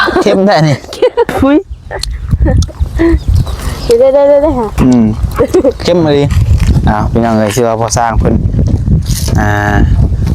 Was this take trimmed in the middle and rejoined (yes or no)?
yes